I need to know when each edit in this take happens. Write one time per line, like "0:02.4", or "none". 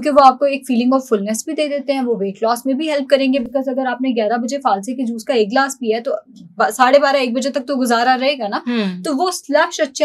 none